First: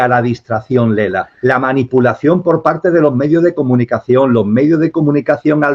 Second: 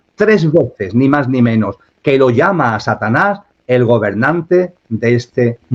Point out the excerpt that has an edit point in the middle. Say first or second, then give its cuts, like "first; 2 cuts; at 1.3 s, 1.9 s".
first; 1 cut; at 1.3 s